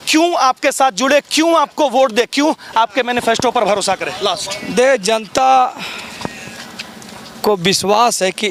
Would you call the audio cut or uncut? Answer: uncut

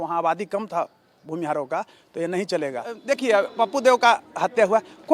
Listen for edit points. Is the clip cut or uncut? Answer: cut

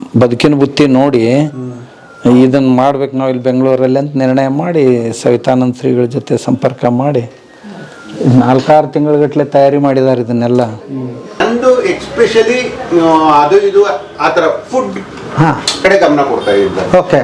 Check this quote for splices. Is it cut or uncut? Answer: cut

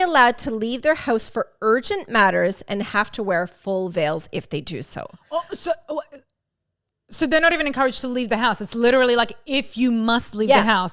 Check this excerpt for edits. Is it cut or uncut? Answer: uncut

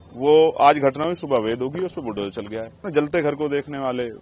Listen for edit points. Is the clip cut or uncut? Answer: cut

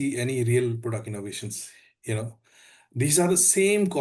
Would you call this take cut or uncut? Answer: uncut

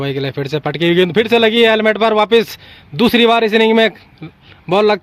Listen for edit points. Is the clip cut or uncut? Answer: uncut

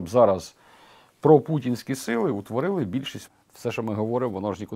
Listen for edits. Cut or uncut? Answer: cut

